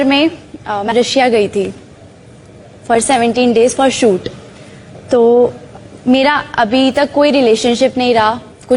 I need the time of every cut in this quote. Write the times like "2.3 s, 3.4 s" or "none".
0.9 s